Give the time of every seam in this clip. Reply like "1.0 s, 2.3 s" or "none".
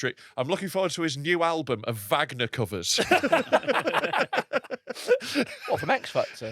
none